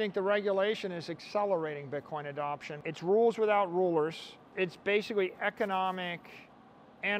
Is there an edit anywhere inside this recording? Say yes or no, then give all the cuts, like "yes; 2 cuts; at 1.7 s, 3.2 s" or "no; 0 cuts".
yes; 2 cuts; at 2.8 s, 4.5 s